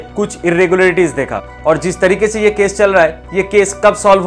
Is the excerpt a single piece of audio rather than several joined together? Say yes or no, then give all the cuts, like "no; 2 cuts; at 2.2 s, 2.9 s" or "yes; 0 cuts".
no; 1 cut; at 1.4 s